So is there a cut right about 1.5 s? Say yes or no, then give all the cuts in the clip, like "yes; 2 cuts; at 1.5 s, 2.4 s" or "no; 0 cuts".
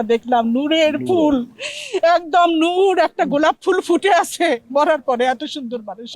no; 0 cuts